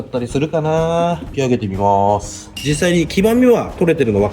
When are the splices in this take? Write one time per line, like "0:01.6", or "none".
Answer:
0:01.3
0:02.5